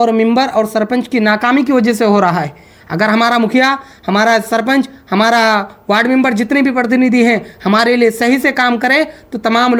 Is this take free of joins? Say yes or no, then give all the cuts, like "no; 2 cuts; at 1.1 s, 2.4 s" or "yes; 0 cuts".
yes; 0 cuts